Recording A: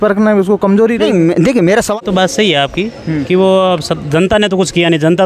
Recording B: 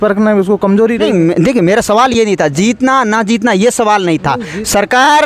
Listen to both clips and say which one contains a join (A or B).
A